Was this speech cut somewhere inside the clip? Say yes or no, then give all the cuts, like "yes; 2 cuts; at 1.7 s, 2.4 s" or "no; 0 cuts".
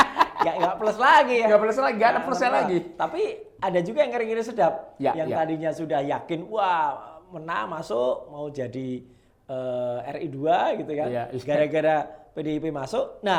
no; 0 cuts